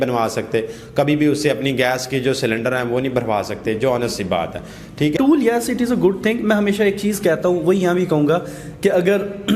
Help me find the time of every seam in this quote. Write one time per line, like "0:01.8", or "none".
0:05.1